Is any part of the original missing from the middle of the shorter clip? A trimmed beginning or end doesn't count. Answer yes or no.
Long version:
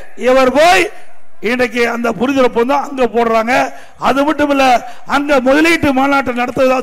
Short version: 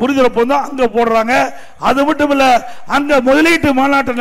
no